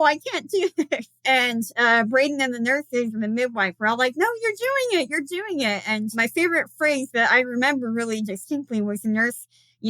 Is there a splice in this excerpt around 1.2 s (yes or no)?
yes